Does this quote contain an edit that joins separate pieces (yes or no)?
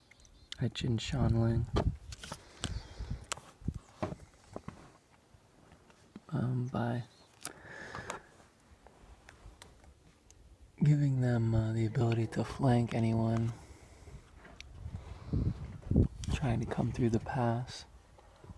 no